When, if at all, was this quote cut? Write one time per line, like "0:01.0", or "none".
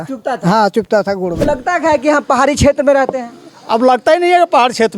0:01.4